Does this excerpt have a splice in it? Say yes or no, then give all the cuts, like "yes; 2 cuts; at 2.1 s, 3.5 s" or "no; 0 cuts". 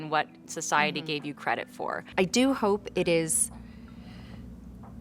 yes; 1 cut; at 2.0 s